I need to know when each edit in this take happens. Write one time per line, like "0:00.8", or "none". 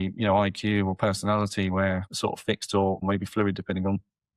0:02.1
0:03.0